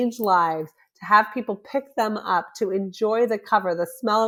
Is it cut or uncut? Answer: uncut